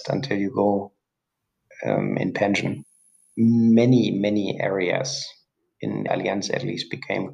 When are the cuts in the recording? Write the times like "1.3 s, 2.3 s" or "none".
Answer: 6.1 s